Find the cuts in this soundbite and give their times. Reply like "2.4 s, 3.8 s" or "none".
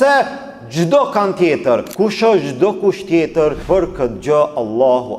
1.9 s, 3.6 s